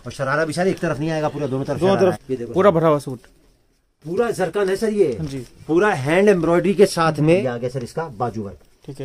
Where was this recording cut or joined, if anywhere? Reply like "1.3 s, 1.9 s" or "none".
2.2 s, 7.4 s